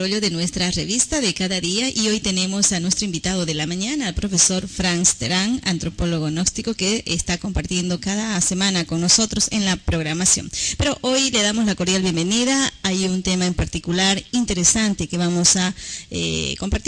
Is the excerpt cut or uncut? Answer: cut